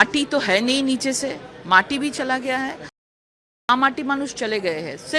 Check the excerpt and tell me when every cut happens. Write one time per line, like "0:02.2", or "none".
0:03.1